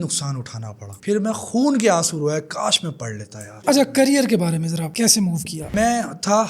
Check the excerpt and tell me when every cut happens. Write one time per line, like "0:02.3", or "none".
0:00.9
0:03.5
0:05.7